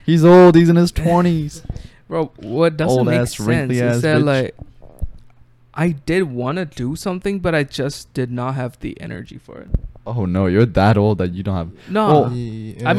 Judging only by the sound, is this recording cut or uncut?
uncut